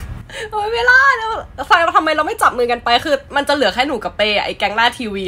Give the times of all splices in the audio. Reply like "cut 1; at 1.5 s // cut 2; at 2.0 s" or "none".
none